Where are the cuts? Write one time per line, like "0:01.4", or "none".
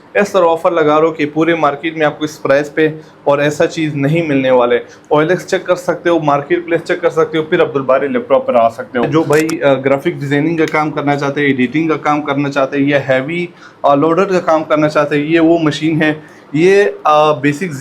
0:09.1